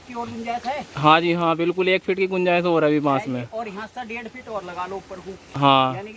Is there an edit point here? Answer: no; 0 cuts

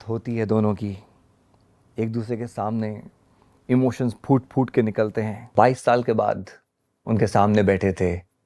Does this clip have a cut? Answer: yes; 1 cut; at 5.5 s

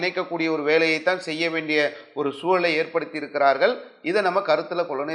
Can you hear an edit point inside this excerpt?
no; 0 cuts

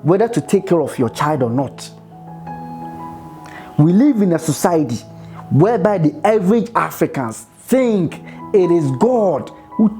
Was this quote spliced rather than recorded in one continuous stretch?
yes; 2 cuts; at 1.9 s, 3.2 s

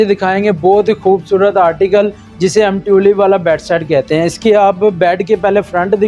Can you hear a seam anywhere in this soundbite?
no; 0 cuts

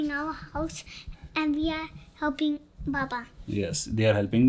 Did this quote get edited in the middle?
no; 0 cuts

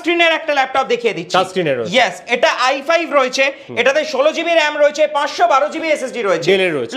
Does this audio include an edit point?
no; 0 cuts

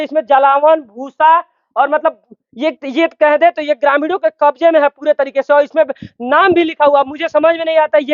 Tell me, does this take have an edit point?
no; 0 cuts

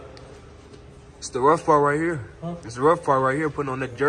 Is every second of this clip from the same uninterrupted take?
yes; 0 cuts

